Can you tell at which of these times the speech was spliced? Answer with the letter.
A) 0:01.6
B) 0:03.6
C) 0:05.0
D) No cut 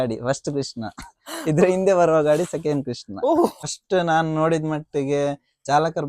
B